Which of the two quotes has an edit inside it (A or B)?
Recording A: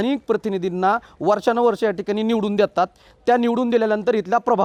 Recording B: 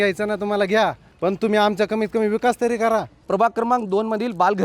B